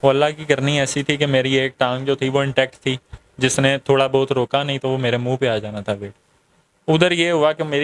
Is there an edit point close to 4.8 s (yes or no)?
no